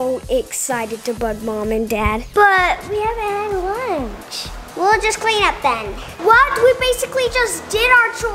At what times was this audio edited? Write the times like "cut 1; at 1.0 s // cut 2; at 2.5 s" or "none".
cut 1; at 2.2 s // cut 2; at 6.0 s